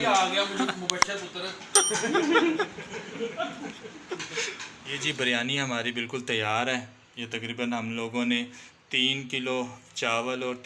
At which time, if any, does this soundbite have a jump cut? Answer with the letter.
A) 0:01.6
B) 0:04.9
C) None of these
B